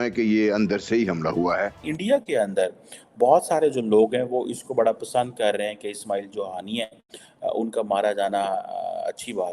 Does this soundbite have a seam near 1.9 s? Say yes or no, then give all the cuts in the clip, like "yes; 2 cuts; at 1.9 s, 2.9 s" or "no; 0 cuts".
yes; 1 cut; at 1.9 s